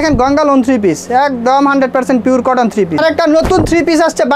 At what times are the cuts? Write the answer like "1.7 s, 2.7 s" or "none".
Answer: 3.0 s